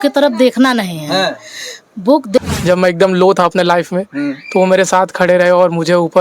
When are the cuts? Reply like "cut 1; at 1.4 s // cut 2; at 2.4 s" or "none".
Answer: cut 1; at 2.4 s